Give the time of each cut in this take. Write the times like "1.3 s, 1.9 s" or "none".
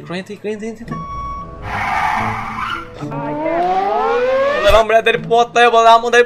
1.0 s, 4.6 s